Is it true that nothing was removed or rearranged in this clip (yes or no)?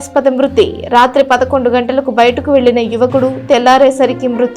yes